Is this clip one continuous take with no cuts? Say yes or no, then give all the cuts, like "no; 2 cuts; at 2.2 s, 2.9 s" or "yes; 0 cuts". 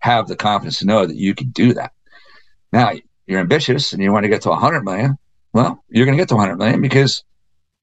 yes; 0 cuts